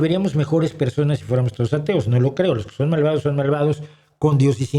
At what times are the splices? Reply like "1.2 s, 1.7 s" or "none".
none